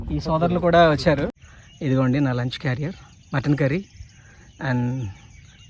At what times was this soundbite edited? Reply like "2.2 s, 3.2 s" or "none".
1.5 s